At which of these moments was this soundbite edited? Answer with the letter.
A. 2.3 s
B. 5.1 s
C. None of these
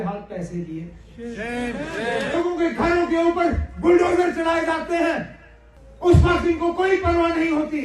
A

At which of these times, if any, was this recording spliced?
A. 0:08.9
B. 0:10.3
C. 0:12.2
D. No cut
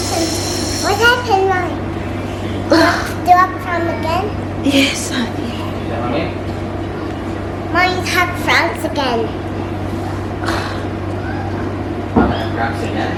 D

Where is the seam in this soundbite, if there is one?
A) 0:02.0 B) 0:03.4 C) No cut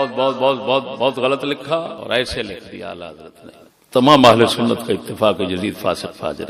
A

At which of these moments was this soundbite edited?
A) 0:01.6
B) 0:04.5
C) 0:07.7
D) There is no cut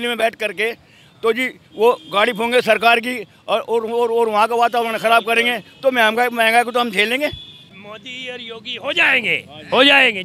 C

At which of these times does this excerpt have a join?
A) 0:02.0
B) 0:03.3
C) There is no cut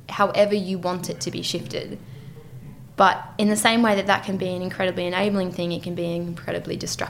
C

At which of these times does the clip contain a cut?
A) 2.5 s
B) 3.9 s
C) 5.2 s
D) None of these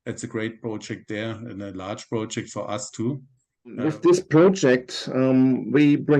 B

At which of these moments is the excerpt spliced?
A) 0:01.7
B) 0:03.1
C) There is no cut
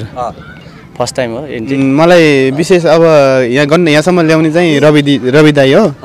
A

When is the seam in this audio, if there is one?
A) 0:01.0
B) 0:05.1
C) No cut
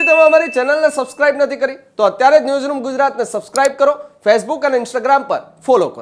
C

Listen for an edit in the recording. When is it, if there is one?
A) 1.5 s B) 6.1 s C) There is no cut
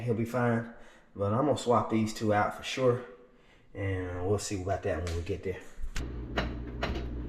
B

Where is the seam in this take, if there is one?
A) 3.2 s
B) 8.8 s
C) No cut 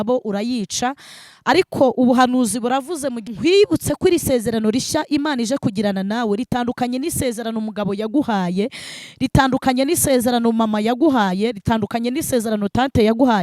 A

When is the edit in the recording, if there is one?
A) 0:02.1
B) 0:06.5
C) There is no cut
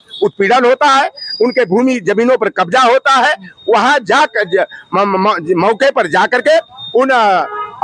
C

